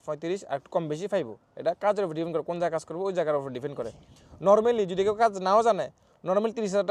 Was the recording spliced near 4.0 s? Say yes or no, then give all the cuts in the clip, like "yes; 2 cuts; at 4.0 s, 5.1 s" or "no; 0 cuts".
no; 0 cuts